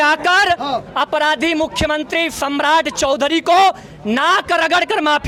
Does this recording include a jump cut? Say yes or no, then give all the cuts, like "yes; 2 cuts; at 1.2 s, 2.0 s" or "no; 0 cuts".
no; 0 cuts